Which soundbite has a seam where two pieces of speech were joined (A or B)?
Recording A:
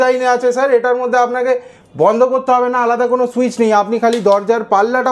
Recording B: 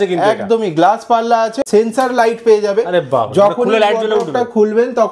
B